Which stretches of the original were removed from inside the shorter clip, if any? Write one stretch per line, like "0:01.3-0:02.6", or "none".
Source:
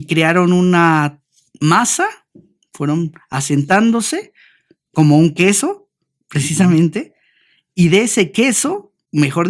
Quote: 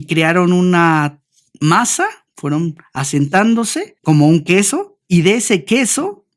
0:02.3-0:02.6
0:04.2-0:04.8
0:05.8-0:07.6